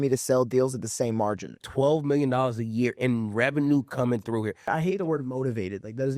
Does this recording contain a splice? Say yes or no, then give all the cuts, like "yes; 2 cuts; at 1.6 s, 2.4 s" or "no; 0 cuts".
yes; 2 cuts; at 1.6 s, 4.7 s